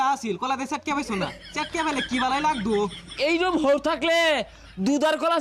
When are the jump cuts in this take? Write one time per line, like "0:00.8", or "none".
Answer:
none